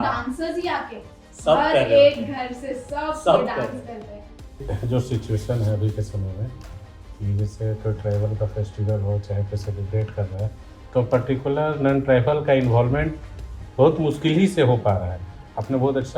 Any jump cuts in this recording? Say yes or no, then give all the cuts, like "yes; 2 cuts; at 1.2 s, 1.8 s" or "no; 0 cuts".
yes; 1 cut; at 4.6 s